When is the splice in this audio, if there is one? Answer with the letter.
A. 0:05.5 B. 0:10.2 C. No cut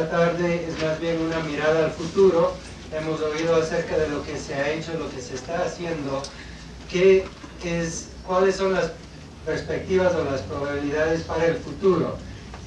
B